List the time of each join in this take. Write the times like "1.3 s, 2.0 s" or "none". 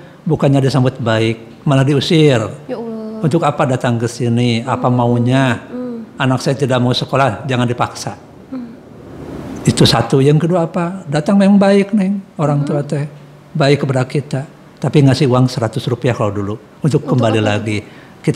none